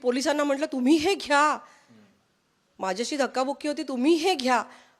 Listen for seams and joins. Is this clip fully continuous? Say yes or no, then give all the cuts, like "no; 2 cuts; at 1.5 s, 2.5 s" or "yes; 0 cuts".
yes; 0 cuts